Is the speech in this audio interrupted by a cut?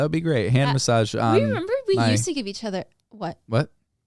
yes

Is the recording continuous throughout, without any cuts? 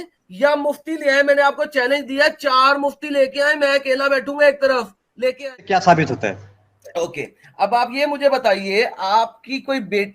no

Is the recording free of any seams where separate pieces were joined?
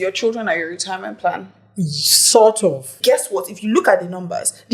no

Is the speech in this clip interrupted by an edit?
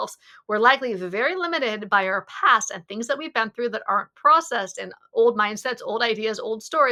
no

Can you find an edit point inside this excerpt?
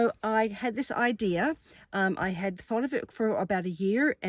no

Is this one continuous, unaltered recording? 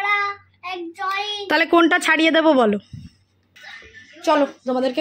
no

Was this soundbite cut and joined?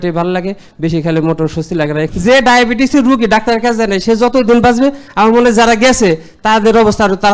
yes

